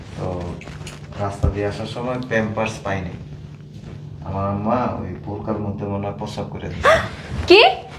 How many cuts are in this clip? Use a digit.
0